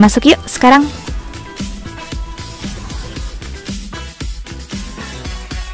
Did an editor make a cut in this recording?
yes; 1 cut; at 0.9 s

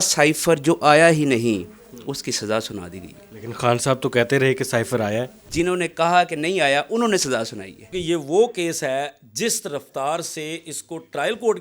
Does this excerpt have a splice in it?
yes; 2 cuts; at 5.4 s, 7.9 s

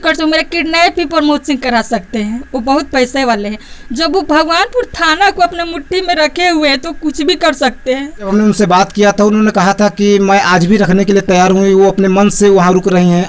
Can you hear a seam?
yes; 1 cut; at 8.3 s

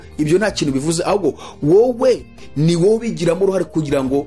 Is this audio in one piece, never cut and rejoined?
yes; 0 cuts

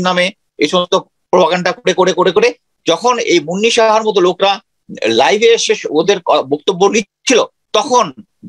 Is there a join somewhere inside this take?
yes; 1 cut; at 7.6 s

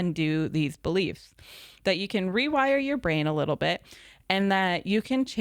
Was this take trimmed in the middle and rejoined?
no; 0 cuts

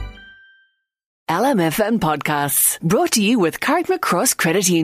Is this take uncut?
no; 1 cut; at 1.2 s

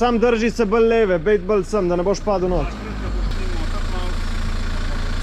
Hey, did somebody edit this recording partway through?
no; 0 cuts

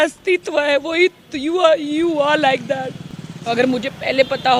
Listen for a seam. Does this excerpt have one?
yes; 1 cut; at 3.4 s

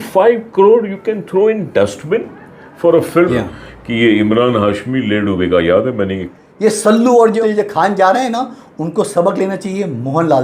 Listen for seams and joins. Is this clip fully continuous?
no; 3 cuts; at 3.1 s, 6.2 s, 7.4 s

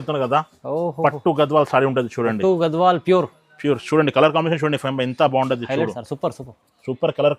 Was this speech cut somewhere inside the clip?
no; 0 cuts

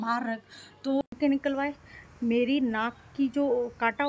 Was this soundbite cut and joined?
yes; 1 cut; at 1.1 s

